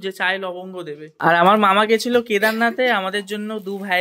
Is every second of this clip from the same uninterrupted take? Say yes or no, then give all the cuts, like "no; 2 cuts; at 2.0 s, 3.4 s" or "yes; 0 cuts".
no; 1 cut; at 1.1 s